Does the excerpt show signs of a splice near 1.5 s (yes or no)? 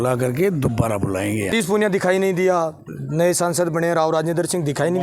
yes